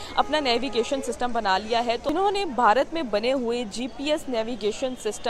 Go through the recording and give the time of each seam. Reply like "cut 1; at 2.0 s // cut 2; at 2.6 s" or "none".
cut 1; at 2.0 s